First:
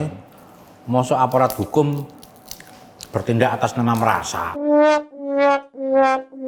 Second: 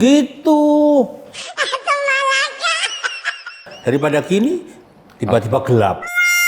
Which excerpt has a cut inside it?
second; 1 cut; at 3.7 s

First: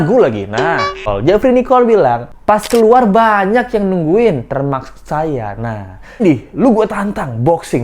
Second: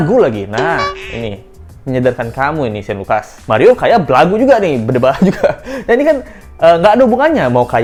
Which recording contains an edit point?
first; 2 cuts; at 1.0 s, 6.2 s

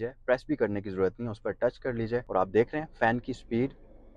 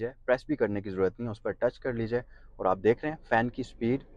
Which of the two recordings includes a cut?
first; 1 cut; at 2.3 s

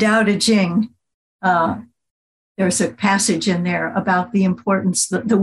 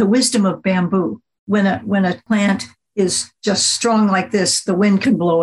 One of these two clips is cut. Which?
second; 3 cuts; at 1.4 s, 2.2 s, 3.3 s

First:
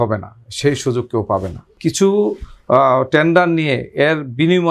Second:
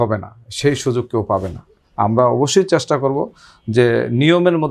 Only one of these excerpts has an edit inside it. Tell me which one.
first; 1 cut; at 1.7 s

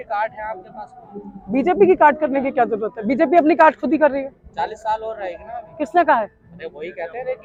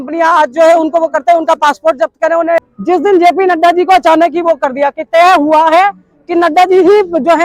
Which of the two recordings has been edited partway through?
second; 1 cut; at 2.6 s

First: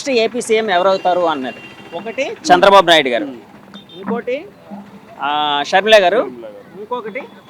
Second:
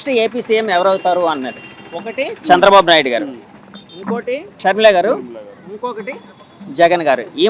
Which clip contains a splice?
second; 1 cut; at 4.6 s

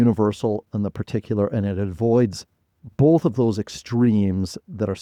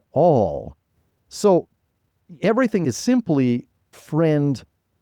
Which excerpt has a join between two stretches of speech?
second; 2 cuts; at 2.8 s, 4.0 s

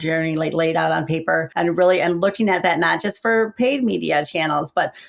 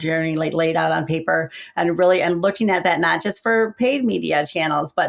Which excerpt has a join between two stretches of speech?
first; 1 cut; at 1.5 s

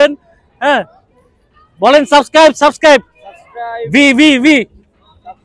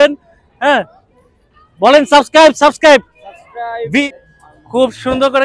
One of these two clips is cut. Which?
second; 1 cut; at 4.0 s

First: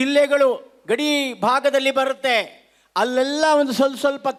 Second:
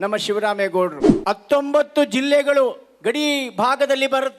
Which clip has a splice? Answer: second; 1 cut; at 1.1 s

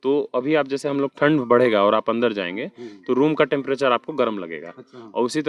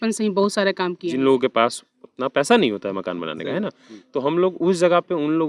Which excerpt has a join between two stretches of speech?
second; 1 cut; at 1.0 s

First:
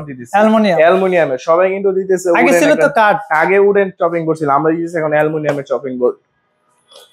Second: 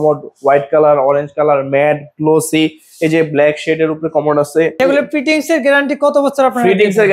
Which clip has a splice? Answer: second; 1 cut; at 4.7 s

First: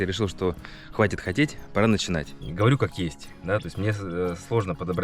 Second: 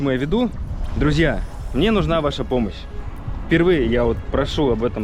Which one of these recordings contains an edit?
first; 1 cut; at 2.4 s

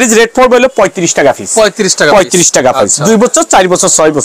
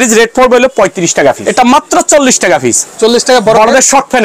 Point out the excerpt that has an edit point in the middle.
second; 1 cut; at 1.4 s

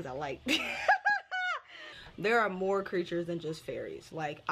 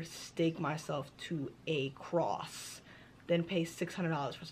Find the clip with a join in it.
first; 1 cut; at 2.0 s

